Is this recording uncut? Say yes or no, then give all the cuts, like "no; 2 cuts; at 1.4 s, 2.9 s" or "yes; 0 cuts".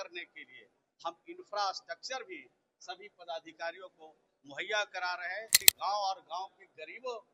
no; 1 cut; at 5.6 s